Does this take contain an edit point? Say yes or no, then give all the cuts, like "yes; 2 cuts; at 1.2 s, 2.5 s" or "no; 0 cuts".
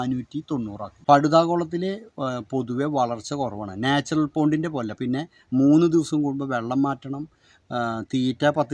yes; 1 cut; at 1.0 s